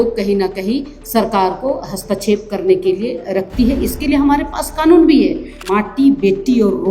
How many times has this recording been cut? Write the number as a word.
one